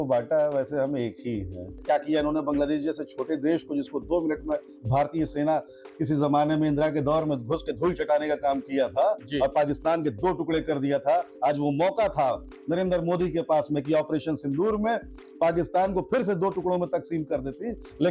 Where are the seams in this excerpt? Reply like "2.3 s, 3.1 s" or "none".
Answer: 1.8 s